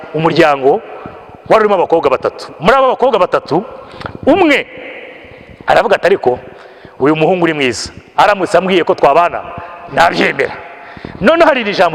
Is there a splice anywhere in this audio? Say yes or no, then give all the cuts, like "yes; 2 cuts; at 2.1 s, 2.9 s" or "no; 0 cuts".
no; 0 cuts